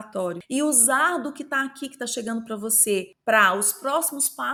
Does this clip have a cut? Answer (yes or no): no